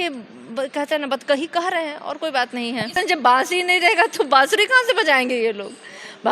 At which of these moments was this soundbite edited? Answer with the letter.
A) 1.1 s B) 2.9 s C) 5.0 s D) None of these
B